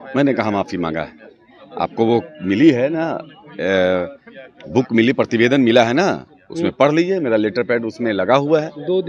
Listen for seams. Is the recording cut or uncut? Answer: uncut